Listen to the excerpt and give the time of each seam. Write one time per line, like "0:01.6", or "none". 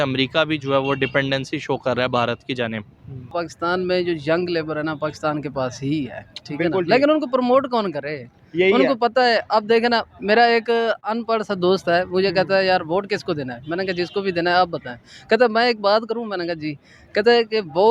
0:03.3